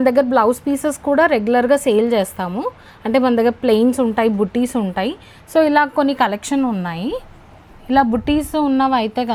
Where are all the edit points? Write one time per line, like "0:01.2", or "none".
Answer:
none